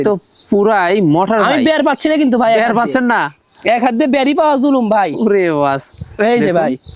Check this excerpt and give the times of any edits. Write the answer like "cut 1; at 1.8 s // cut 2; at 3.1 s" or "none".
none